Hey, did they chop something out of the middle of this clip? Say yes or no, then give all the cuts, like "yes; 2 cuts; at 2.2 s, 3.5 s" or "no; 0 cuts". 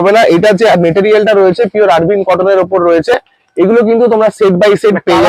no; 0 cuts